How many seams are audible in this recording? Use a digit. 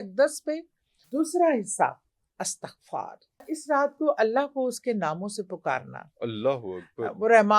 2